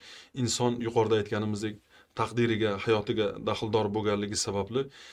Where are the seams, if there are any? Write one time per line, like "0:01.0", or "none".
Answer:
none

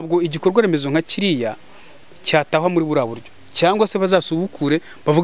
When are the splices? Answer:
none

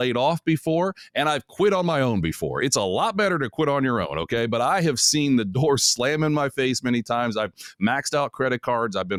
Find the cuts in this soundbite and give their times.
none

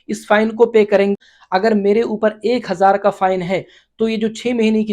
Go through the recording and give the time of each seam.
0:01.1

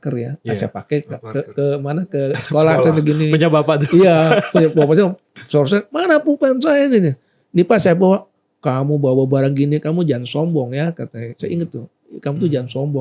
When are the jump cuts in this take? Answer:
none

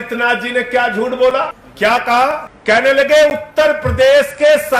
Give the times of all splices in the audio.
0:01.6
0:02.5

